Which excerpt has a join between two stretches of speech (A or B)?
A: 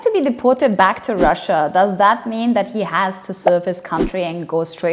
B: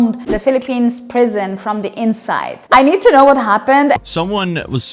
B